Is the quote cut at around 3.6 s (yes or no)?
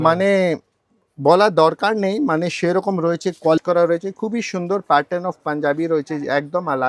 yes